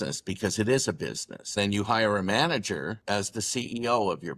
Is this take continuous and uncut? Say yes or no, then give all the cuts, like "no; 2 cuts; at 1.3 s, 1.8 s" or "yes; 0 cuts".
no; 2 cuts; at 1.6 s, 3.0 s